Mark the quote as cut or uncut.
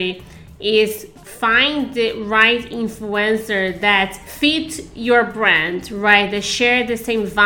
cut